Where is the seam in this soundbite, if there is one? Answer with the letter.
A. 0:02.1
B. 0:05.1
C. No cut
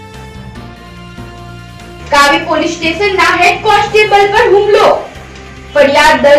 A